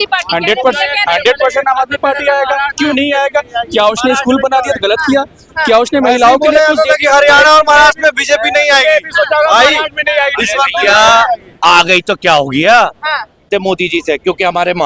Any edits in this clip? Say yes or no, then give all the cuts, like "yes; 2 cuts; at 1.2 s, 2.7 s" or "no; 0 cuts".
yes; 1 cut; at 13.5 s